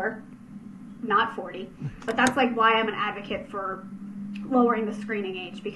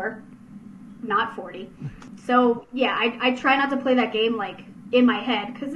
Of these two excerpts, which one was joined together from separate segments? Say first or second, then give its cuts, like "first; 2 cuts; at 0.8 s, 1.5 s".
first; 1 cut; at 1.9 s